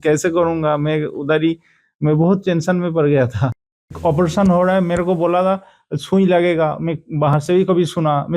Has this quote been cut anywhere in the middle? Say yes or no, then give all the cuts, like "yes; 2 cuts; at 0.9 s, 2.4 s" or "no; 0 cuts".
yes; 1 cut; at 3.8 s